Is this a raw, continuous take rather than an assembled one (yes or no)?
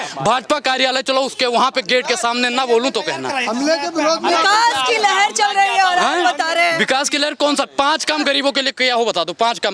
yes